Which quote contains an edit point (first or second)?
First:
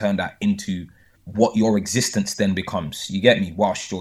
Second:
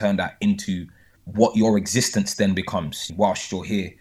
second